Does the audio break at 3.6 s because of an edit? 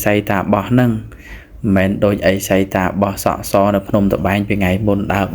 no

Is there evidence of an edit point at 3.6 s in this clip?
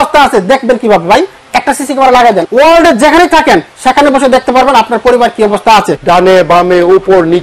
no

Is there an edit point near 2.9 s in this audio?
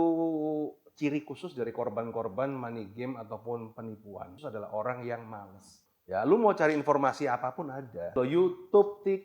no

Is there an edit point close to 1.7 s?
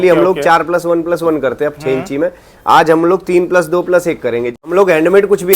no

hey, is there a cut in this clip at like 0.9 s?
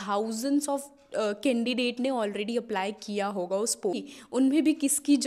no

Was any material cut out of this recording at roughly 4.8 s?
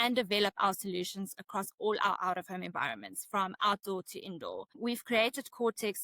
yes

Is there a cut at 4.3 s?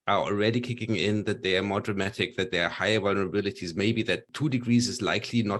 yes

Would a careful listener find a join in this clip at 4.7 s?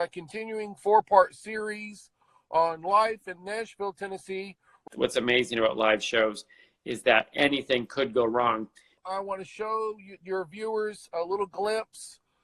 yes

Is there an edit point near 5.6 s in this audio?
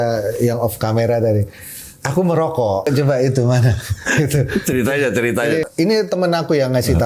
yes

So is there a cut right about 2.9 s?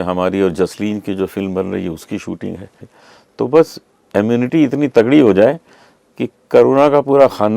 yes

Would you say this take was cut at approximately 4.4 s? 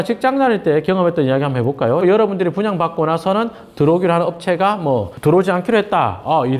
no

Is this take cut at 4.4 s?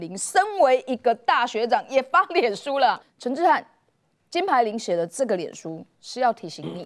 no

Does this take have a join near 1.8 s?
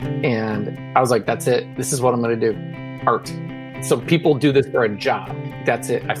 yes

